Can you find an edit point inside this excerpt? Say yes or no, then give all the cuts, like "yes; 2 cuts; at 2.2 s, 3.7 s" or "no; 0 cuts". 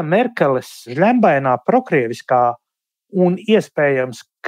yes; 1 cut; at 0.9 s